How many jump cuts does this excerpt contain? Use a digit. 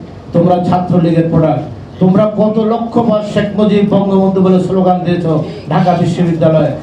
0